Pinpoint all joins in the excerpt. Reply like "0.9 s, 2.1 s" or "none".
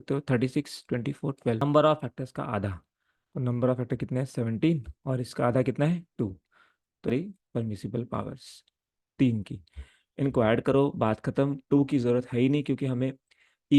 1.6 s, 7.1 s